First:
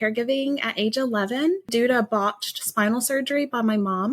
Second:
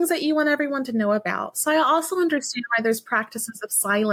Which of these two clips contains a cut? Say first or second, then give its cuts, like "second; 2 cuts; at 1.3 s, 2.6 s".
first; 1 cut; at 1.7 s